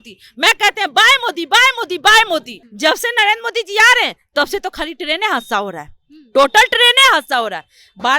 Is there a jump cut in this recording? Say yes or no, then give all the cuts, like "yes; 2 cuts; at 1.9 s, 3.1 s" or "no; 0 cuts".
yes; 1 cut; at 2.6 s